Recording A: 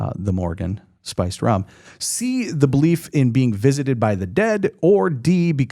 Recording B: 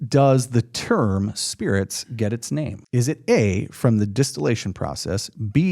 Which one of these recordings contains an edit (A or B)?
B